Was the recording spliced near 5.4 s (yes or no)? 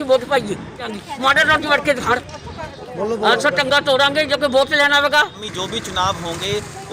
yes